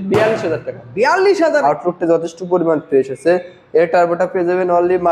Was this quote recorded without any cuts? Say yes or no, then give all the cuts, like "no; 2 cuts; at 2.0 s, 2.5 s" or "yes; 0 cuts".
no; 1 cut; at 1.6 s